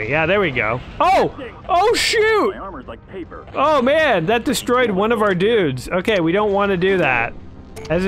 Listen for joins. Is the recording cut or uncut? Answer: uncut